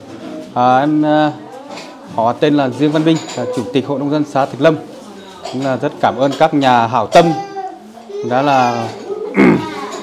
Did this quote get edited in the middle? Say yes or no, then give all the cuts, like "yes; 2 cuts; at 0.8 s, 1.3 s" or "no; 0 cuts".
no; 0 cuts